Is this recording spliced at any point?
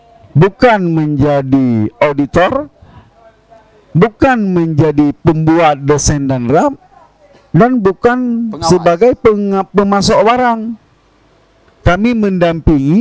no; 0 cuts

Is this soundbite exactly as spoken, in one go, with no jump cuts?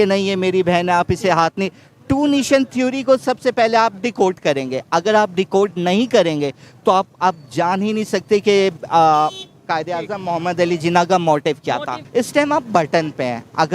no; 1 cut; at 12.0 s

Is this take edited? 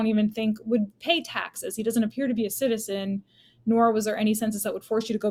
no; 0 cuts

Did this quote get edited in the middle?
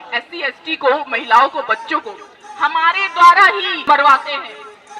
yes; 1 cut; at 3.8 s

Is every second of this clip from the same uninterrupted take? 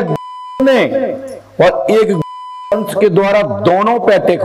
yes; 0 cuts

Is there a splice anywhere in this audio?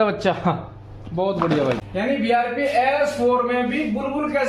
yes; 1 cut; at 1.8 s

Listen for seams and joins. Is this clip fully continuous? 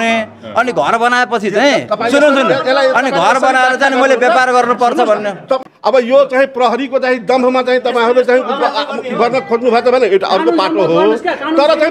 no; 1 cut; at 5.6 s

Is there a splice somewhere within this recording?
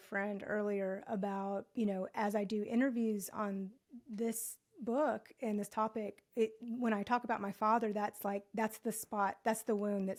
no; 0 cuts

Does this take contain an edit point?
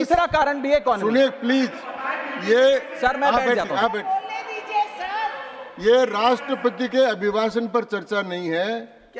no; 0 cuts

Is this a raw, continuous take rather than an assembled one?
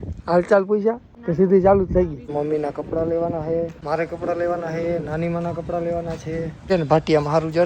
no; 4 cuts; at 1.1 s, 2.3 s, 3.8 s, 6.7 s

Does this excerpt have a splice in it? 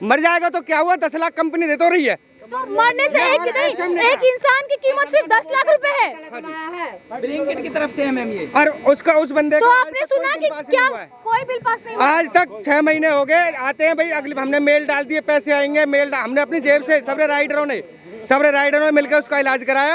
no; 0 cuts

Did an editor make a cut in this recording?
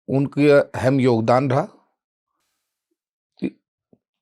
no; 0 cuts

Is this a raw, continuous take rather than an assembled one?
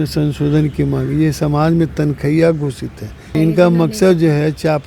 no; 1 cut; at 3.3 s

